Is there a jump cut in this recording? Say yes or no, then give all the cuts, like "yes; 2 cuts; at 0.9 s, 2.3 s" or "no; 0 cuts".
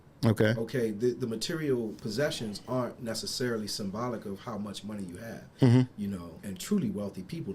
yes; 1 cut; at 6.3 s